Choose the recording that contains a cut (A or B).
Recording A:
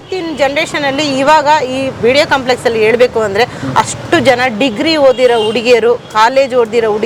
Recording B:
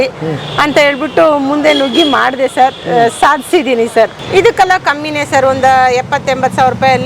B